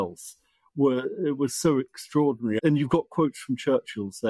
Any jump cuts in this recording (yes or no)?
yes